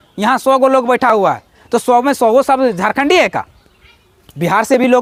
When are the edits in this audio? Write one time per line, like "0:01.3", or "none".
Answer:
none